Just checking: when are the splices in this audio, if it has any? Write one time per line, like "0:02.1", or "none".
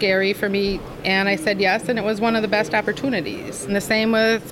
0:00.9
0:03.7